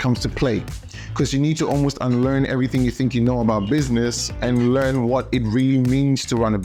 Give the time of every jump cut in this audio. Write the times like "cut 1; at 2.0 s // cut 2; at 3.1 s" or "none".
none